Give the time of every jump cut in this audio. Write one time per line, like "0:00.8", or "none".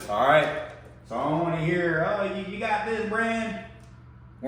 none